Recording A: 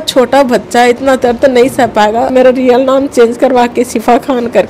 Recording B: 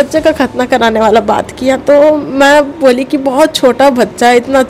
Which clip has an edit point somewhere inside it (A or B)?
A